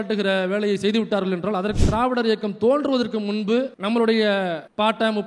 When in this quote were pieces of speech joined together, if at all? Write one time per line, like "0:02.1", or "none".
0:01.8